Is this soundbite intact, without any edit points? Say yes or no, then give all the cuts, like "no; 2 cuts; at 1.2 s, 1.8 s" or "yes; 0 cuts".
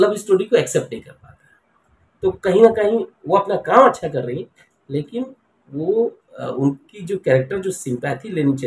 yes; 0 cuts